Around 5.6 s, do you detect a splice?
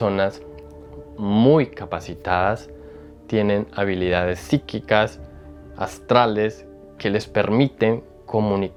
no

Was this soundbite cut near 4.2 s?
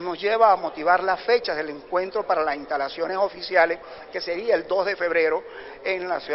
no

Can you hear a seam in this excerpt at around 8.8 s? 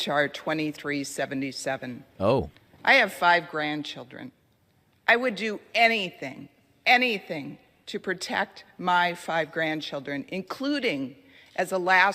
no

